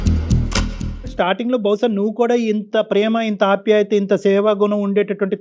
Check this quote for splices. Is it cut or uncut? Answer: uncut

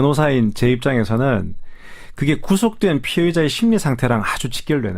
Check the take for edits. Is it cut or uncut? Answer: cut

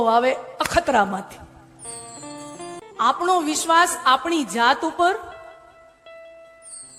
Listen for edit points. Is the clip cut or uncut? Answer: cut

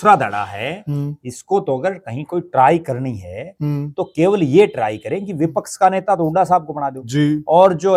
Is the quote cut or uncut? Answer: uncut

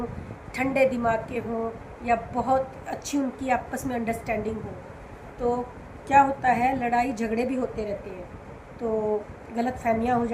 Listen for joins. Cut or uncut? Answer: uncut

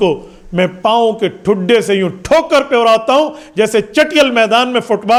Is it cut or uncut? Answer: uncut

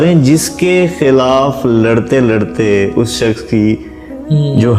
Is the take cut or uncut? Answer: uncut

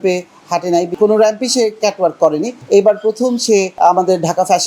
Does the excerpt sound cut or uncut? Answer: cut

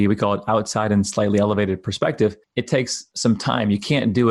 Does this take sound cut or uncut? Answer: cut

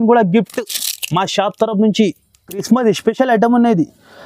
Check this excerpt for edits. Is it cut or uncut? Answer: cut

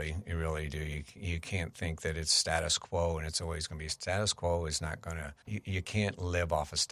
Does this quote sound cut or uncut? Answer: cut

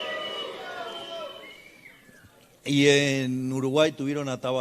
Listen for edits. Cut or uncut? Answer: uncut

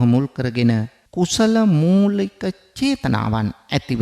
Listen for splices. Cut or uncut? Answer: cut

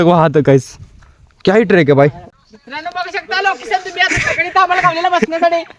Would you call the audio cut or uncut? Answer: cut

